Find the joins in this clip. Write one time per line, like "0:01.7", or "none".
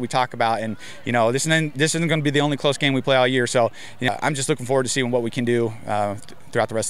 0:04.1